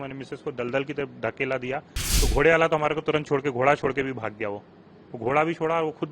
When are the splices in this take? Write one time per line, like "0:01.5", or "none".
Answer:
0:02.0